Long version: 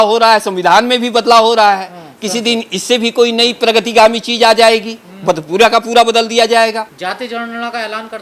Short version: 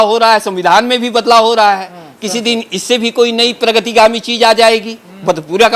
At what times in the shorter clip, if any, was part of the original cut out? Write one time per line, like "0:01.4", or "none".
none